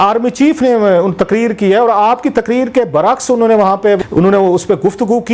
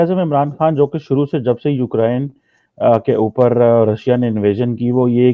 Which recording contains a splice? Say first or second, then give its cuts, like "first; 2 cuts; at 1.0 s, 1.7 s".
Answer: first; 1 cut; at 4.0 s